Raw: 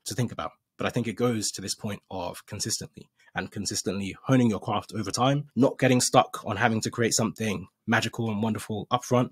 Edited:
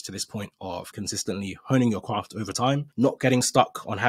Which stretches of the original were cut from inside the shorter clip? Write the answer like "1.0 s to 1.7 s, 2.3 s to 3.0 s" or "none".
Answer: 2.4 s to 3.5 s

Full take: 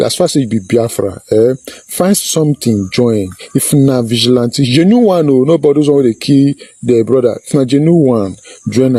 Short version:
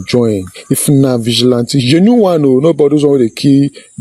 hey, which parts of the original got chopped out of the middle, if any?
none

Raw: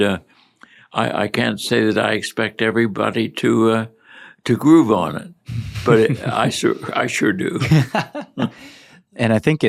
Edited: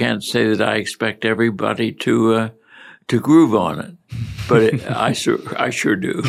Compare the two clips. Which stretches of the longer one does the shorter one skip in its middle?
none

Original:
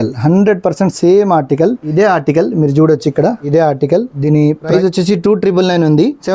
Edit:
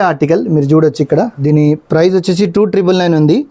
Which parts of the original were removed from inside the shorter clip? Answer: 3.9 s to 4.5 s

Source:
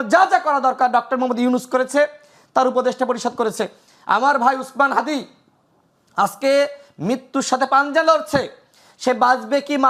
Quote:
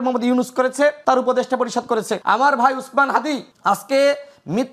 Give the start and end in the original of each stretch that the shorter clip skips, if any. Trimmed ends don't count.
2.1 s to 2.5 s, 3.6 s to 4.0 s, 5.3 s to 6.0 s

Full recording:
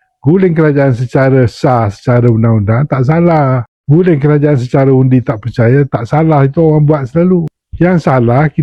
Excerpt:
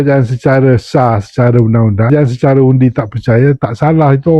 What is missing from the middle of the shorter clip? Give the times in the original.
2.8 s to 4.4 s

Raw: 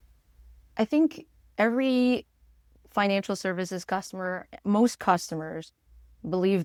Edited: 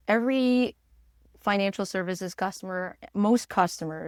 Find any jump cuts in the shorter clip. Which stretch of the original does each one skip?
none

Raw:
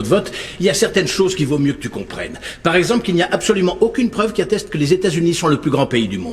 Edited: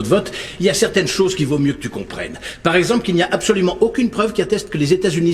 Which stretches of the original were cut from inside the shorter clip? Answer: none

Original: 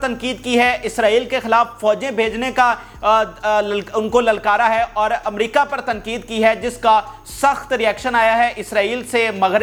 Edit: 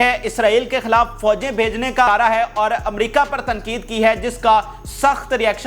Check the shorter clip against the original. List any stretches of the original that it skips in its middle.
2.7 s to 4.5 s

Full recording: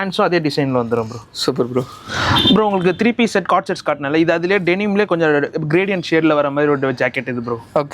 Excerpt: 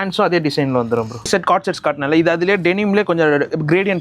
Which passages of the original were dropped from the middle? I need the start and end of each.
1.3 s to 3.3 s

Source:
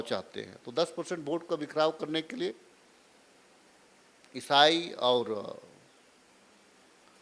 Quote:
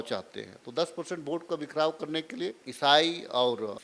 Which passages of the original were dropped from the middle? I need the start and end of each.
2.6 s to 4.3 s

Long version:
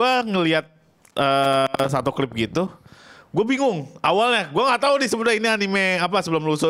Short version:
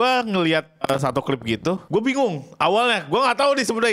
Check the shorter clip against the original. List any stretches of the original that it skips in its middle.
0.8 s to 1.7 s, 2.7 s to 3.3 s

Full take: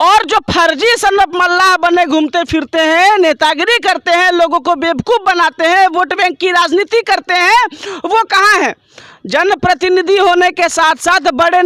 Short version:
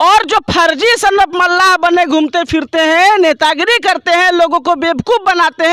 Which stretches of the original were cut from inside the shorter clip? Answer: none

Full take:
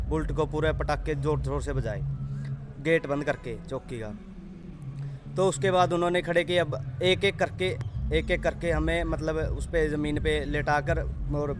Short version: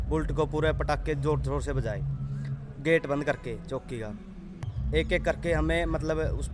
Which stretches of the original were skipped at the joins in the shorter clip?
4.7 s to 7.9 s

